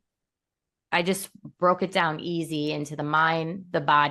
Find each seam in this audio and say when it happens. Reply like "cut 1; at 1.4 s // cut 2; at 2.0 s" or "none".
none